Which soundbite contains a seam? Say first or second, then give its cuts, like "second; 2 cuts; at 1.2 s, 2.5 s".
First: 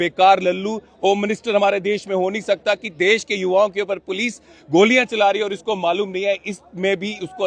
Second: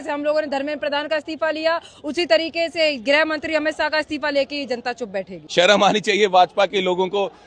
second; 1 cut; at 5.4 s